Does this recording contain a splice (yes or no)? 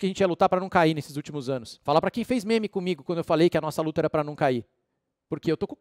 no